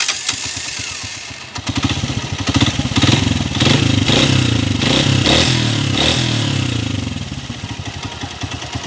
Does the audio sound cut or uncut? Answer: uncut